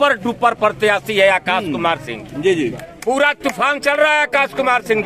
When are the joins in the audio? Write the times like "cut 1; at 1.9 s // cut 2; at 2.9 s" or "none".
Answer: cut 1; at 2.9 s